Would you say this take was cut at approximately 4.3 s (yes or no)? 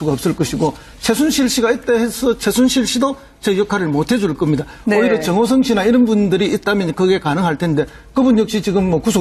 yes